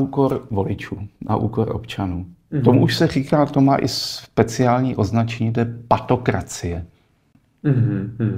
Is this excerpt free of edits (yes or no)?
yes